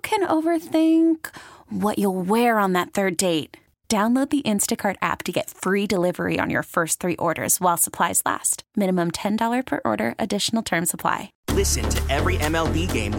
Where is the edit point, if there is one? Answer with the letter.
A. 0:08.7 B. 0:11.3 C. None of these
B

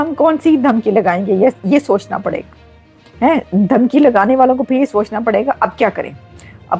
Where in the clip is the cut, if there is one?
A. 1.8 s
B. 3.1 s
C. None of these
C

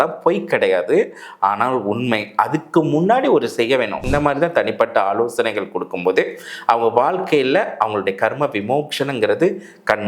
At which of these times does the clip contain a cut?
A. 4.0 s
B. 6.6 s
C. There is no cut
A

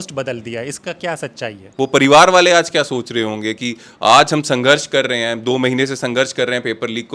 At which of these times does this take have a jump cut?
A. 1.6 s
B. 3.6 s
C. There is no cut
A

